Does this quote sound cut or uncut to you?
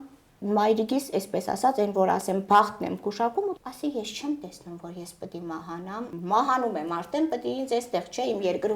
cut